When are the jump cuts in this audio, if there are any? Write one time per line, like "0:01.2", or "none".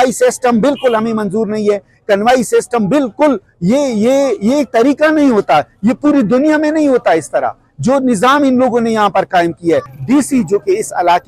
0:09.9